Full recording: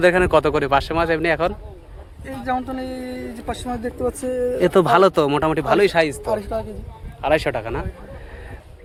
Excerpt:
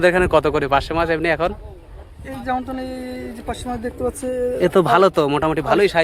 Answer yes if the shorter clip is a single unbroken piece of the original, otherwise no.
yes